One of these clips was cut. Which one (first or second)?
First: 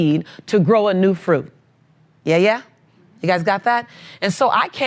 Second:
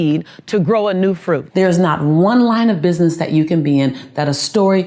second